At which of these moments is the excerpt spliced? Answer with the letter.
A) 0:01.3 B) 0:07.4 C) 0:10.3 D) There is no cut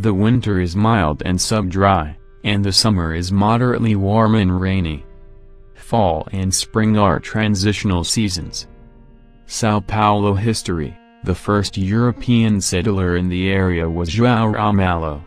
D